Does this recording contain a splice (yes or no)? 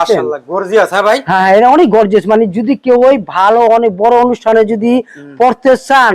no